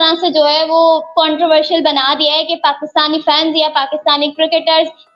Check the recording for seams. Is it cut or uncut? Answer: uncut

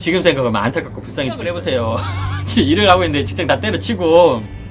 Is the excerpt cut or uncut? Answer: cut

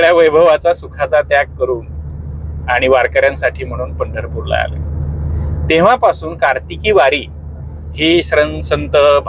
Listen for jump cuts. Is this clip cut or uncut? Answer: uncut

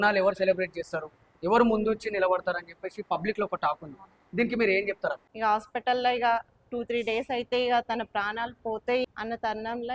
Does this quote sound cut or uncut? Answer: cut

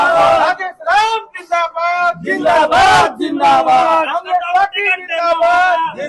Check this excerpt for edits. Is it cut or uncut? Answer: uncut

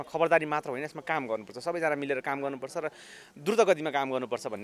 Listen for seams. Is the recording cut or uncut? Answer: uncut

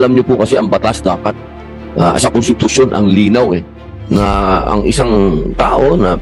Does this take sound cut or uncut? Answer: uncut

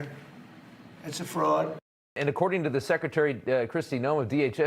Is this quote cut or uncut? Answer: cut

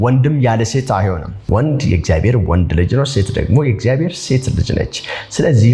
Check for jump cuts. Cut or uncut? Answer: cut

